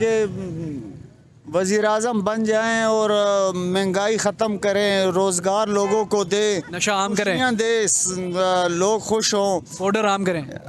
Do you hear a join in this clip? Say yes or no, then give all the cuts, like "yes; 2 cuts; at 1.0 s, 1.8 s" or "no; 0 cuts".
no; 0 cuts